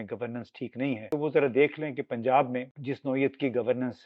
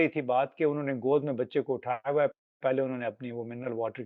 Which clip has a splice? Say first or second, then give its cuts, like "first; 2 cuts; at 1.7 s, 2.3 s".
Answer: first; 2 cuts; at 1.1 s, 2.7 s